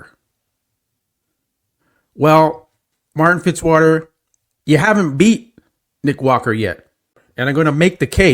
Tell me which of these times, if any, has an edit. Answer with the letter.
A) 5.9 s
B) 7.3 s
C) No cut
B